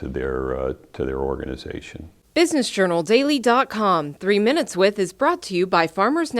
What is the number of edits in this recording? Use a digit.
1